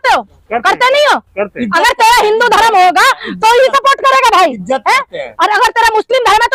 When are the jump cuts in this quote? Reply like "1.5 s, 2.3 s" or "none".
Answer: none